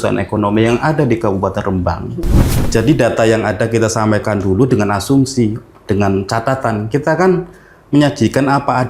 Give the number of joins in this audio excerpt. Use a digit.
1